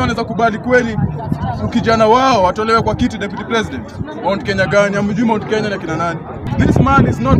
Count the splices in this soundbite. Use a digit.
1